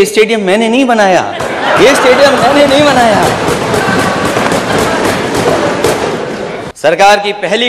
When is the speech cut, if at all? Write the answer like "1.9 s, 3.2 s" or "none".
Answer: 6.6 s

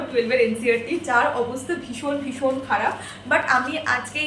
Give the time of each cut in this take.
none

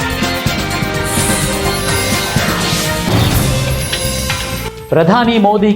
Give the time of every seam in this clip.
1.2 s, 4.0 s

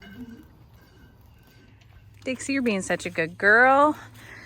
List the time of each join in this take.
1.5 s

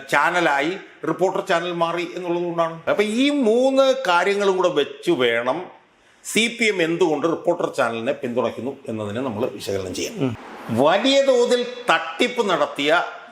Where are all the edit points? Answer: 2.8 s, 10.5 s

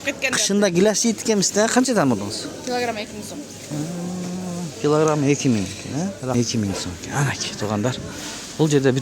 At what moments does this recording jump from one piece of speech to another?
6.3 s

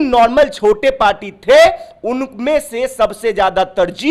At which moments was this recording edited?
none

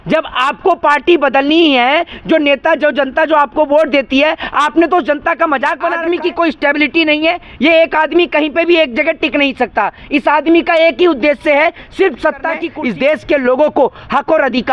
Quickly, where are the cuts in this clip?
6.0 s, 12.7 s

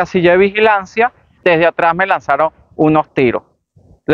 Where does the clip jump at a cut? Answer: 1.4 s

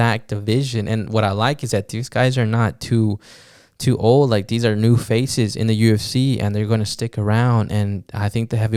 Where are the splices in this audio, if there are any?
none

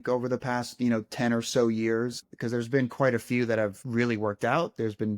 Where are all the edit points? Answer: 2.3 s, 3.8 s

